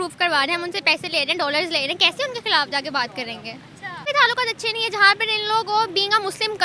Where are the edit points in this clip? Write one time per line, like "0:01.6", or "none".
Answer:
0:04.1